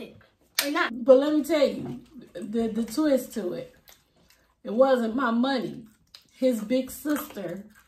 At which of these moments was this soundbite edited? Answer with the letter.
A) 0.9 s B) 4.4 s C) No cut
A